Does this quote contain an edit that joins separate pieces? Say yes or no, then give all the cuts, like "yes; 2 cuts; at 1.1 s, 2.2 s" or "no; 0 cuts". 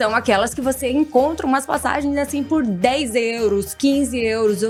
no; 0 cuts